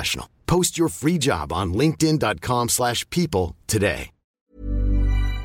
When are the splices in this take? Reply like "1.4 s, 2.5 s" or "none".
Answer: 4.4 s